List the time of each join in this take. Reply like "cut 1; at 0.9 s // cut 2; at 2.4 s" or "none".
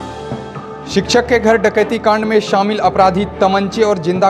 cut 1; at 0.9 s